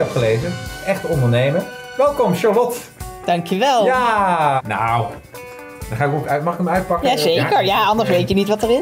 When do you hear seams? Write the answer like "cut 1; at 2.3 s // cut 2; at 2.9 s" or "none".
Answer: cut 1; at 1.8 s // cut 2; at 4.6 s